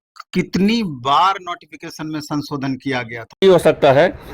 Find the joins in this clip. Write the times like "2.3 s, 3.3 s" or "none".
3.4 s